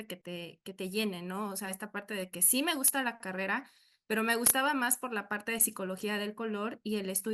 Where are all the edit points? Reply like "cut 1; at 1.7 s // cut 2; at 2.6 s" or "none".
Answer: none